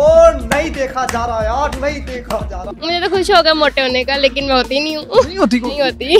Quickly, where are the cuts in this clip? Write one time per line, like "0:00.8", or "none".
0:02.6